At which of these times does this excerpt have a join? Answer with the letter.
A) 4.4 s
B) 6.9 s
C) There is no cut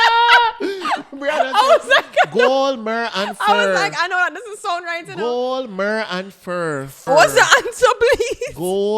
B